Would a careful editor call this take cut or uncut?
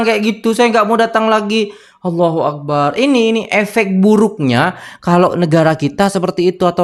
uncut